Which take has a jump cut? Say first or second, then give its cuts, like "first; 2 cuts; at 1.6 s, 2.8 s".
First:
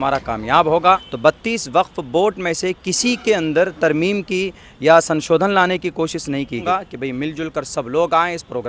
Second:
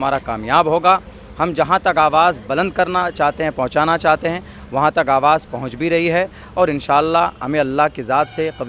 first; 2 cuts; at 1.1 s, 6.6 s